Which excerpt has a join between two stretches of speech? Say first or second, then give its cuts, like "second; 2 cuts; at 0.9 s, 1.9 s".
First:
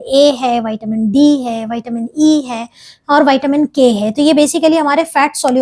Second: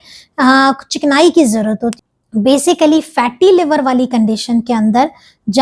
second; 1 cut; at 1.9 s